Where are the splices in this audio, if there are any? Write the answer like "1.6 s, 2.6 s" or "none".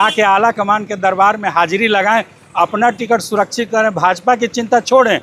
none